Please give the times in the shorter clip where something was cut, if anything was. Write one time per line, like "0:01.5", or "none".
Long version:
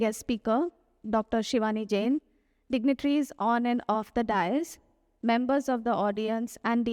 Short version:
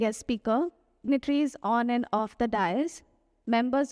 0:01.1